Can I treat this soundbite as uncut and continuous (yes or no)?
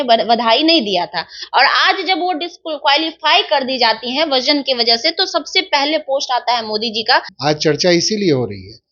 no